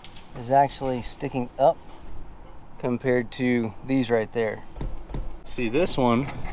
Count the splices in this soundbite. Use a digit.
1